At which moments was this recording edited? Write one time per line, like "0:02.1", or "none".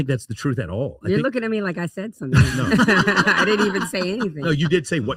none